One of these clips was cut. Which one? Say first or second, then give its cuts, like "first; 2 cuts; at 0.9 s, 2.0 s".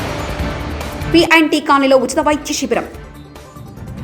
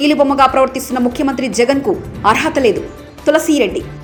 first; 1 cut; at 1.0 s